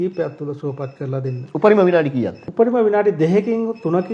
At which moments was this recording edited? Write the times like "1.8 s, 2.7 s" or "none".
2.4 s

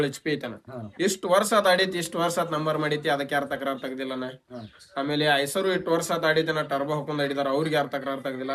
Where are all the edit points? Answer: none

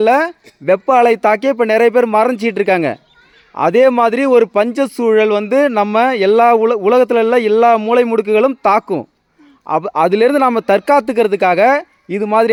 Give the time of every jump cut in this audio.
none

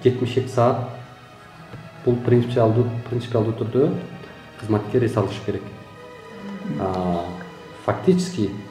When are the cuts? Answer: none

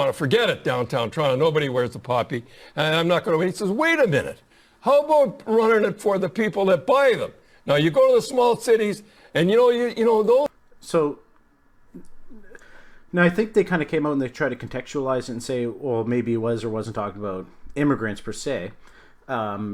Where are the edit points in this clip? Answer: none

